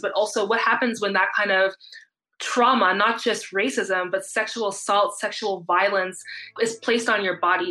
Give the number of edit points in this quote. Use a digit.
1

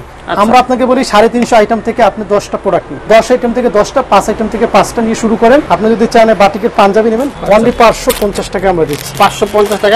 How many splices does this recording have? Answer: 3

